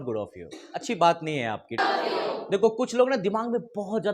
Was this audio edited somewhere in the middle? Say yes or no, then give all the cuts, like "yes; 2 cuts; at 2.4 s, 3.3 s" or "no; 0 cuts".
yes; 1 cut; at 1.8 s